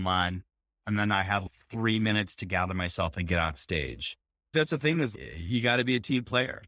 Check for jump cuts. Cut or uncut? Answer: uncut